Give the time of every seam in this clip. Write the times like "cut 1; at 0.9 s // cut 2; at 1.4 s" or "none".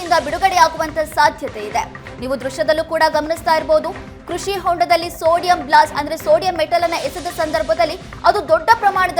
none